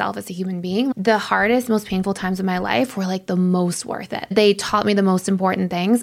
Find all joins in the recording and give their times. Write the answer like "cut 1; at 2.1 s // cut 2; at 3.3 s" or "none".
cut 1; at 0.9 s // cut 2; at 4.3 s